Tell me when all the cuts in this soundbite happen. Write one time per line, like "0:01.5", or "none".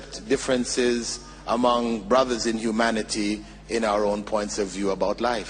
none

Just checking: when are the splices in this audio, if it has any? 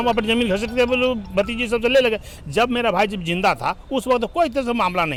none

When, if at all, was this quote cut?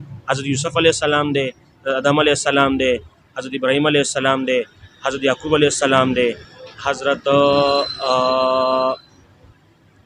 none

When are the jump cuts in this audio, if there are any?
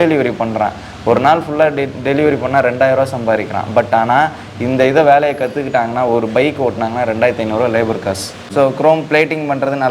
0:08.5

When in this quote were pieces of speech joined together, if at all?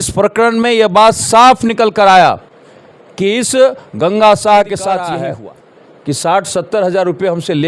0:05.2

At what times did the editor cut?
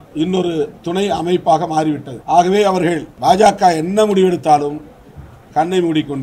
0:02.1
0:03.1

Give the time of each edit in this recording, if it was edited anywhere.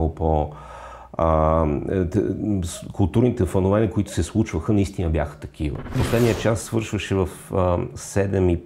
0:06.0

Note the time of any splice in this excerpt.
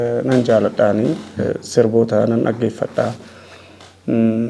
none

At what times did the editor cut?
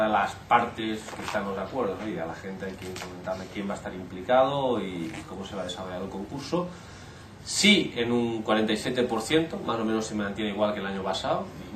0:01.8

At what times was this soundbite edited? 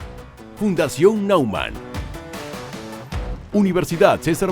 0:03.4

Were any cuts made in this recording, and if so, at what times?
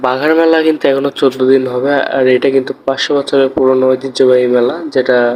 none

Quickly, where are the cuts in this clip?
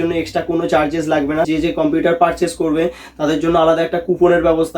0:01.5

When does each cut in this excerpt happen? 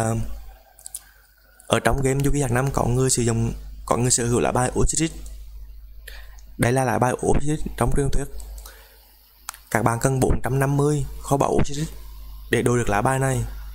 none

